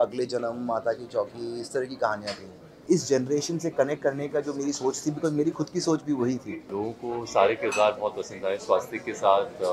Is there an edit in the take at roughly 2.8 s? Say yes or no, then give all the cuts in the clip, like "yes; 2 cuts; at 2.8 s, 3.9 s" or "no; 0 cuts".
yes; 2 cuts; at 2.8 s, 6.7 s